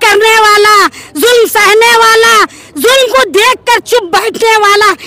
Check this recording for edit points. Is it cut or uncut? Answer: uncut